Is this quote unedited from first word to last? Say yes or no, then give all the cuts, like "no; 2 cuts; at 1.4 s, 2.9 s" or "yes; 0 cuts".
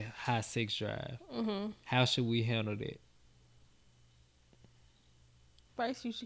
yes; 0 cuts